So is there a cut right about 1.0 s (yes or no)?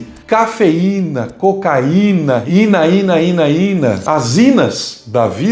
no